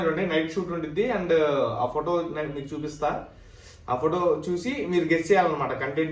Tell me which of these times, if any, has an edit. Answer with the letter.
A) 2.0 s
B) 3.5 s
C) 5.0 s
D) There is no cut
D